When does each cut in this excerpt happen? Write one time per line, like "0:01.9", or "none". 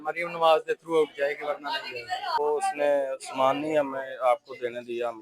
0:02.4